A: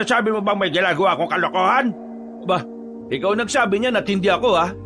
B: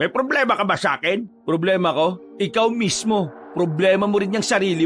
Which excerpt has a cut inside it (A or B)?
B